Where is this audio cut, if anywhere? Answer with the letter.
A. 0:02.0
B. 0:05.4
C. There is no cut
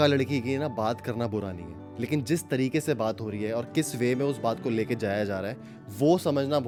C